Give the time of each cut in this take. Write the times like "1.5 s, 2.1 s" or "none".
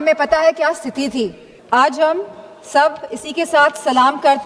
1.5 s